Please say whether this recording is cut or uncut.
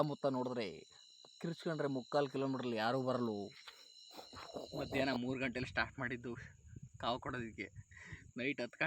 cut